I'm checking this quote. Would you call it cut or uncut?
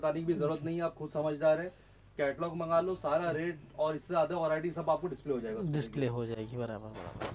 uncut